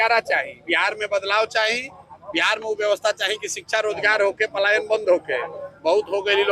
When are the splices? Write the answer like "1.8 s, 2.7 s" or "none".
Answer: none